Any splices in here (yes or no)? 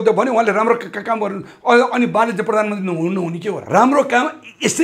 yes